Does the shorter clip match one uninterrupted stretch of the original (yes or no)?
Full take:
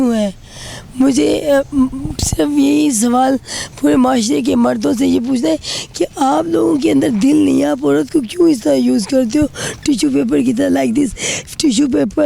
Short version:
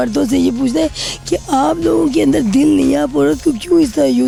yes